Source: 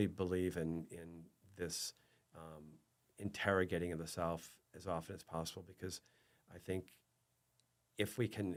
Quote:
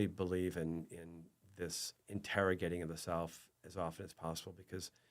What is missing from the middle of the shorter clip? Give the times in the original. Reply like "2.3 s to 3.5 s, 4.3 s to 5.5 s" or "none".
1.9 s to 3.0 s